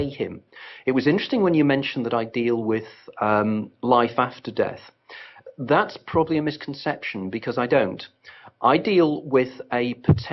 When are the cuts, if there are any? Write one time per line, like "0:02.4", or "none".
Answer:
0:06.0